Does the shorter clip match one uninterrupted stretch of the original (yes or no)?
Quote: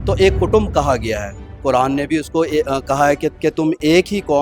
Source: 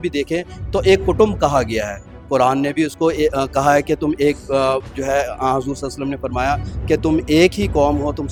no